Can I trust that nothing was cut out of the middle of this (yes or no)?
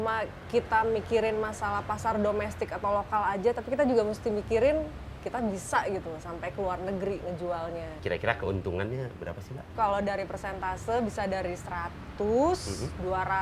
no